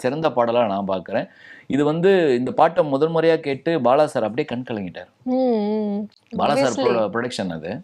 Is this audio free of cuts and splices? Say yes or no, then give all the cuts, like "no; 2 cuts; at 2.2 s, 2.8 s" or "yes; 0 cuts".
yes; 0 cuts